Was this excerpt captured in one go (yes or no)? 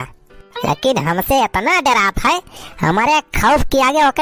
yes